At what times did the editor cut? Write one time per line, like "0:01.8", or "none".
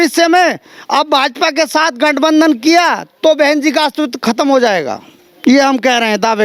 none

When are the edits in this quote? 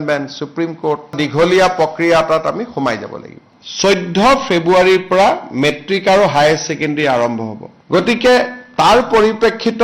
0:01.1
0:03.4

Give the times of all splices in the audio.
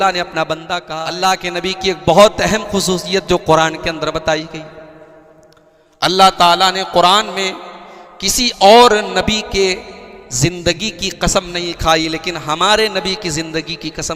0:01.0

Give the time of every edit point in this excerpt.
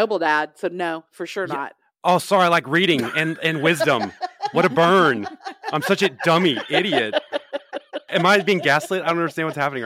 0:08.1

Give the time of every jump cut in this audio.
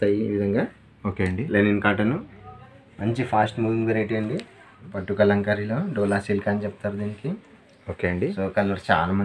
0:04.9

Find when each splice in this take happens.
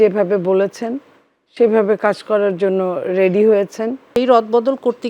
0:04.1

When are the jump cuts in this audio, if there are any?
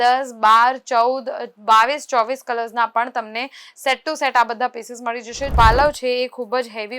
0:05.5

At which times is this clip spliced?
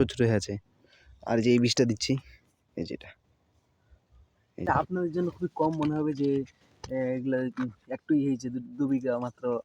0:04.6

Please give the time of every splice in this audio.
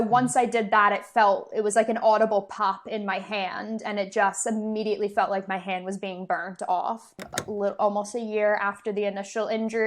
0:07.2

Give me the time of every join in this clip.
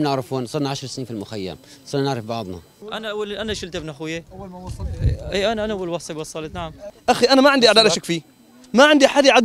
0:02.8
0:06.9

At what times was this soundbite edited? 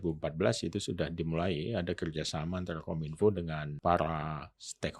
0:03.6

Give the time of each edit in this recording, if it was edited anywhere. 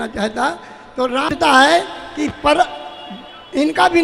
0:01.3

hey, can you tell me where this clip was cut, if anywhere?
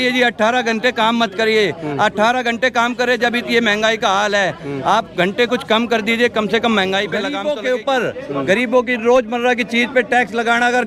0:07.3

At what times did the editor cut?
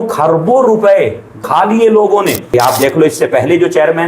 0:01.5
0:02.5

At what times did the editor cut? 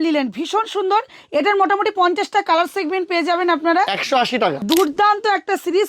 0:04.6

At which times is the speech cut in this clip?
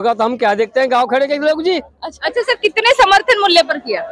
0:02.1

